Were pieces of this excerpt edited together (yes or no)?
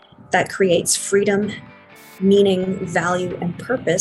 no